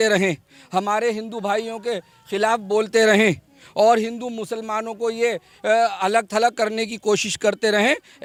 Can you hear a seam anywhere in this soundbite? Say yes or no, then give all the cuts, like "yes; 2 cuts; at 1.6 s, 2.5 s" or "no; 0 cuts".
no; 0 cuts